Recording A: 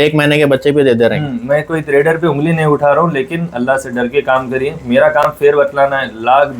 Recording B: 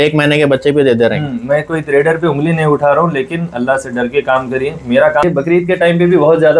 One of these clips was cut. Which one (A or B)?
B